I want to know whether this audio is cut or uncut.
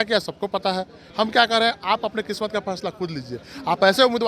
cut